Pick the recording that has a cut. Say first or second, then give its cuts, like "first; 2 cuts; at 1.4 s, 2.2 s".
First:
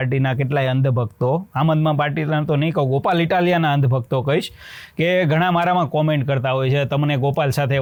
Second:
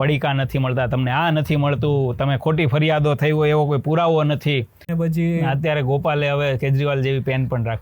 second; 1 cut; at 4.8 s